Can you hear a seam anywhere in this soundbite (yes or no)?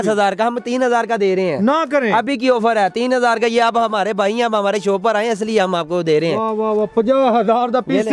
no